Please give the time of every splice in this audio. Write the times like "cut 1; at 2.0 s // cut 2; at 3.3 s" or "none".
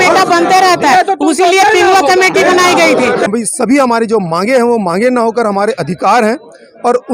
cut 1; at 3.3 s